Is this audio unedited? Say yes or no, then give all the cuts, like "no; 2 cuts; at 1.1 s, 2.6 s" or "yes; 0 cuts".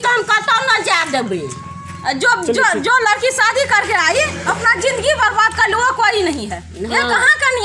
yes; 0 cuts